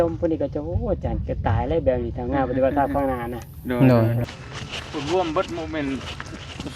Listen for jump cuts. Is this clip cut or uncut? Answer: cut